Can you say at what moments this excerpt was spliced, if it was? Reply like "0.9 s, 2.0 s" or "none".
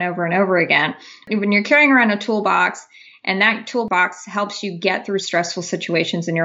1.2 s, 3.9 s